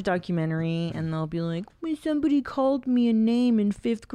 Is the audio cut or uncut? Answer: uncut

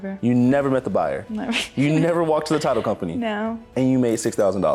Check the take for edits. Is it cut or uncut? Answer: uncut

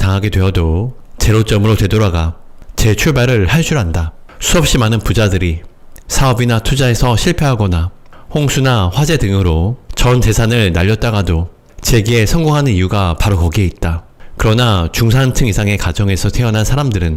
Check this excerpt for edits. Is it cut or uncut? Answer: uncut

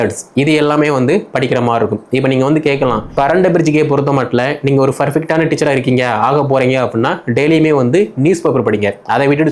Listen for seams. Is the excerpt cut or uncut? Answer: cut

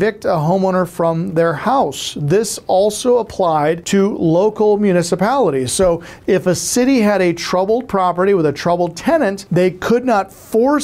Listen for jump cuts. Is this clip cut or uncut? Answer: cut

